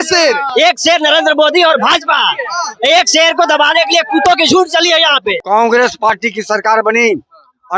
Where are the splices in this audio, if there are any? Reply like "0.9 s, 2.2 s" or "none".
5.3 s